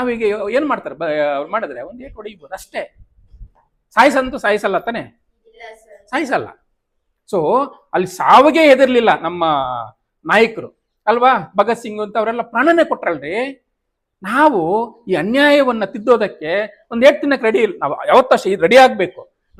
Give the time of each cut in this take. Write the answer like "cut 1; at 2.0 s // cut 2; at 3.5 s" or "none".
none